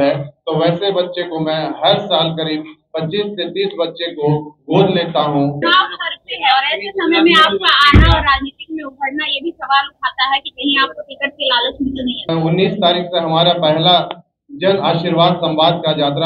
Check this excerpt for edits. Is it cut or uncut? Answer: cut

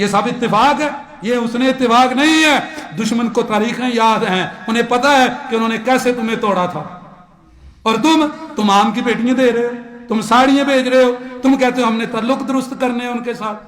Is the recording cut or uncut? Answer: cut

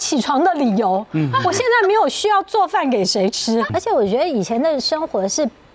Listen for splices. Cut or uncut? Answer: cut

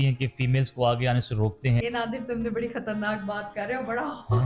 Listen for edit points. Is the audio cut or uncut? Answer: cut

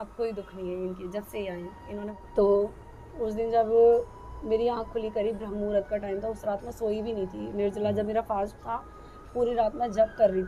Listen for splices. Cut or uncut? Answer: cut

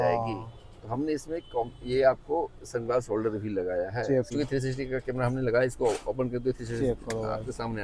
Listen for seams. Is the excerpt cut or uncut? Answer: cut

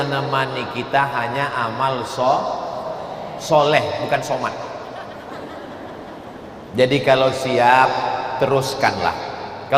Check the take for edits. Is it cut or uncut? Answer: uncut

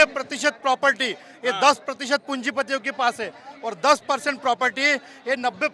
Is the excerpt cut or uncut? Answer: uncut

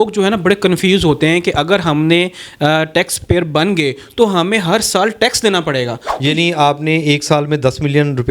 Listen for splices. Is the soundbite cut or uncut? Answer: cut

